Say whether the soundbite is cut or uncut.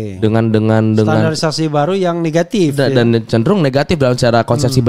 uncut